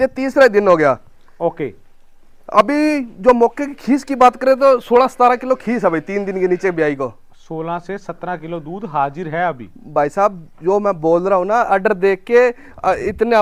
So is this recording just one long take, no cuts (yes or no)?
yes